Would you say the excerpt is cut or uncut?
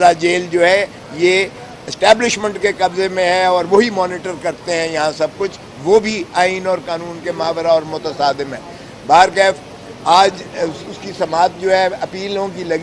uncut